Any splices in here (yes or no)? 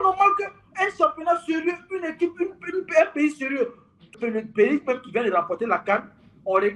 yes